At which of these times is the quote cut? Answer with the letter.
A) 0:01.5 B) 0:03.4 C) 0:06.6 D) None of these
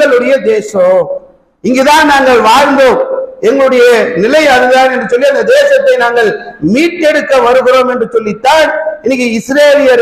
D